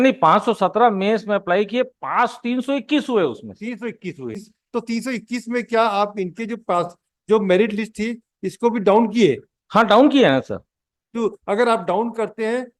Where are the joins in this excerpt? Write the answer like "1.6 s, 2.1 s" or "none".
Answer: 4.5 s